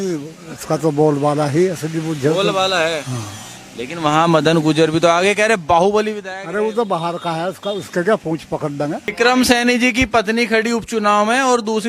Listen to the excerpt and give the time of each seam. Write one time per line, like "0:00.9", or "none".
0:09.0